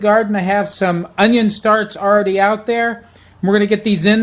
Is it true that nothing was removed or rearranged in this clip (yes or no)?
yes